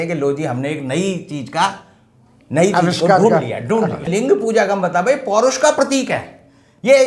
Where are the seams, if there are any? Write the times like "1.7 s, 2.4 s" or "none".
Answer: 4.1 s